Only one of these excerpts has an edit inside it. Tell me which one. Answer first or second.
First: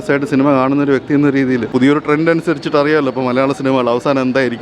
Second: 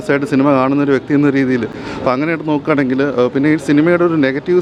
first